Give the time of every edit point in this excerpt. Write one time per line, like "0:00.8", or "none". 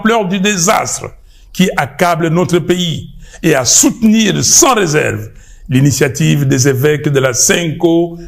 none